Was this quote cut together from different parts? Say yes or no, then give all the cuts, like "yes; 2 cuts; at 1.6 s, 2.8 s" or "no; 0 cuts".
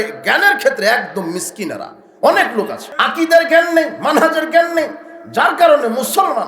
yes; 1 cut; at 2.8 s